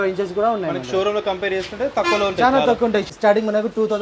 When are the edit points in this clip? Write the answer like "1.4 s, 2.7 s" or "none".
3.1 s